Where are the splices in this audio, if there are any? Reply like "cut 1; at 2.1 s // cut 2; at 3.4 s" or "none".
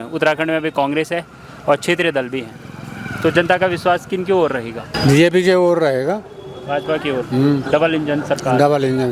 cut 1; at 4.9 s